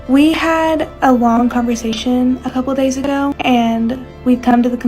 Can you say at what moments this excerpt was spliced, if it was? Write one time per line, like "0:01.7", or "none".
0:00.9
0:03.4